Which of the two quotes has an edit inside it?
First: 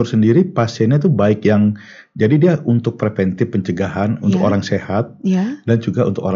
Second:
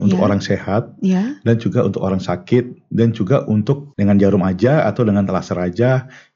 second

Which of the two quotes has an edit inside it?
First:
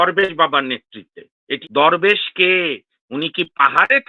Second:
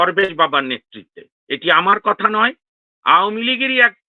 first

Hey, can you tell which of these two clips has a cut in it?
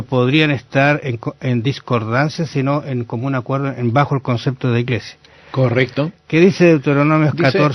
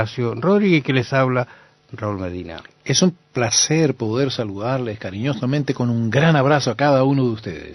second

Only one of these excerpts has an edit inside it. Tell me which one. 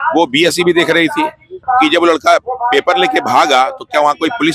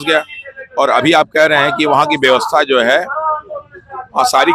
first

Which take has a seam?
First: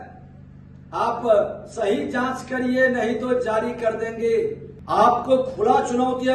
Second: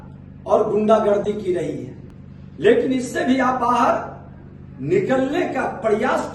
first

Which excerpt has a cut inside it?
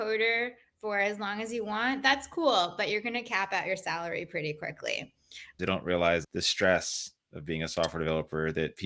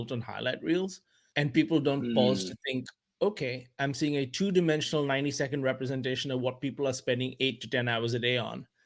first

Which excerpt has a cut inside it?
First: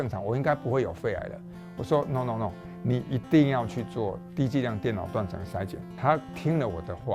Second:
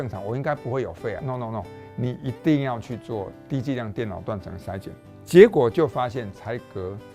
second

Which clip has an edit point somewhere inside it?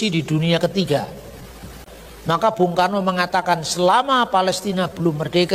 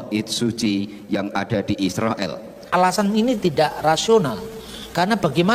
second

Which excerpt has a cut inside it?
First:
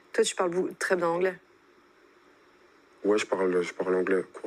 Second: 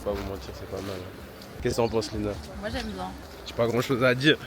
second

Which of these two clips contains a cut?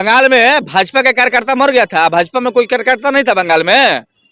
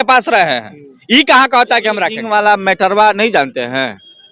second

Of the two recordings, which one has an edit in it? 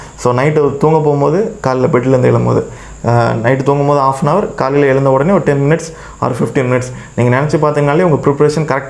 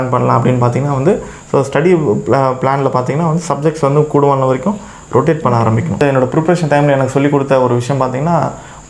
second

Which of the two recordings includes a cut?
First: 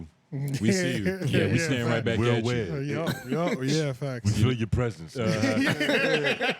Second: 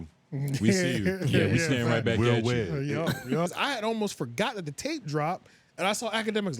second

